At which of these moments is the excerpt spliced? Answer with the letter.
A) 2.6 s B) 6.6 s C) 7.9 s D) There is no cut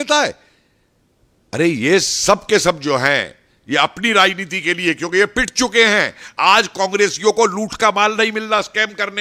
D